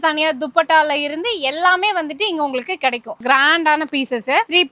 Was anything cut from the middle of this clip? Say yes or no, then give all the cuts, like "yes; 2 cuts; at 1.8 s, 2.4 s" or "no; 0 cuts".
yes; 1 cut; at 3.2 s